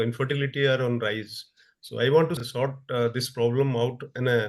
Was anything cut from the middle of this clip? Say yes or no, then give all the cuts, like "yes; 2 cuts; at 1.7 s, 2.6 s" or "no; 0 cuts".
no; 0 cuts